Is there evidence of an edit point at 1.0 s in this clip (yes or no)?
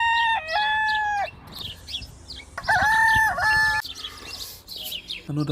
yes